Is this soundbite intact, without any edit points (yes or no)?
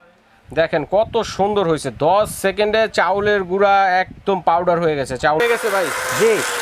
no